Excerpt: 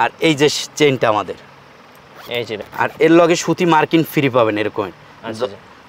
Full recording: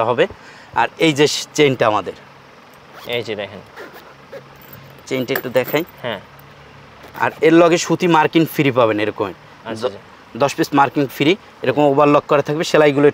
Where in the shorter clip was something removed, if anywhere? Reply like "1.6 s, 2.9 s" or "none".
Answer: 2.6 s